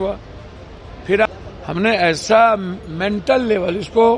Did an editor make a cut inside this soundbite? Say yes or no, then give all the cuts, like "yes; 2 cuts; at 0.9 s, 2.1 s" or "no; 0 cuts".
yes; 1 cut; at 1.3 s